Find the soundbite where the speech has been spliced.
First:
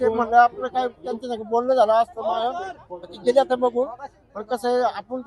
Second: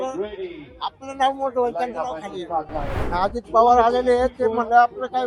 second; 1 cut; at 3.0 s

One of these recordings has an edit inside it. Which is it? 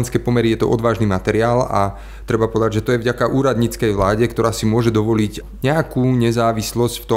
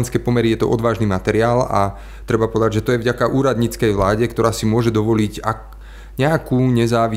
first; 1 cut; at 5.4 s

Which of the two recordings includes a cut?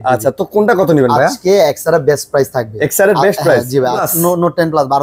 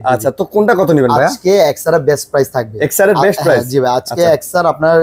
first; 1 cut; at 4.1 s

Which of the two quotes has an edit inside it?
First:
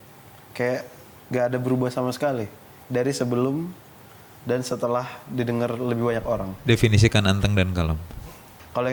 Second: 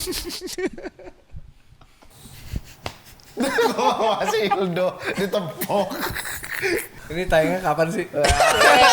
second; 2 cuts; at 2.2 s, 7.0 s

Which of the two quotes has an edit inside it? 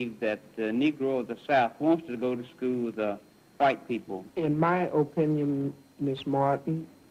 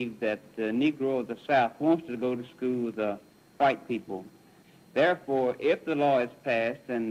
first; 1 cut; at 4.2 s

